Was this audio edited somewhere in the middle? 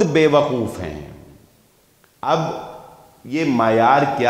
no; 0 cuts

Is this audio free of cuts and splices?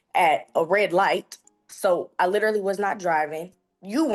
yes; 0 cuts

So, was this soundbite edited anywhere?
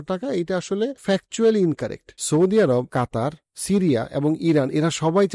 yes; 2 cuts; at 1.0 s, 2.1 s

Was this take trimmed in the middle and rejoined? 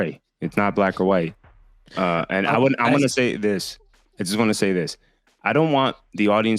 no; 0 cuts

